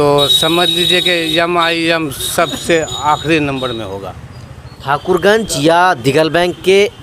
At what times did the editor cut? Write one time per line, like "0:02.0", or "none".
none